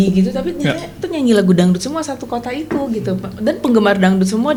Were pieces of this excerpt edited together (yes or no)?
no